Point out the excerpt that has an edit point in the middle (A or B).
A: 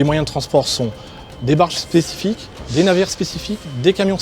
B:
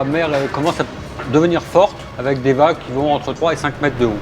B